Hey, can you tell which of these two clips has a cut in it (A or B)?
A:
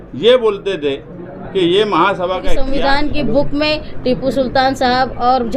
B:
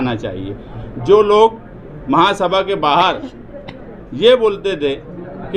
A